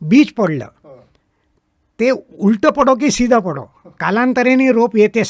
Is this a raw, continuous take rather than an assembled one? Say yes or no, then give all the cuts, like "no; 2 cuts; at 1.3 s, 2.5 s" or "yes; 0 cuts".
yes; 0 cuts